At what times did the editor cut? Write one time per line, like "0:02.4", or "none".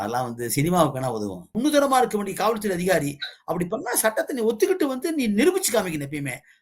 0:01.5